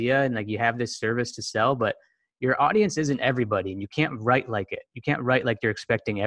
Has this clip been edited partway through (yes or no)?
no